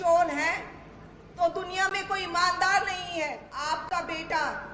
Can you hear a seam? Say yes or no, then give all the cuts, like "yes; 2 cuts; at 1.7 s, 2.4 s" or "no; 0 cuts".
yes; 1 cut; at 3.5 s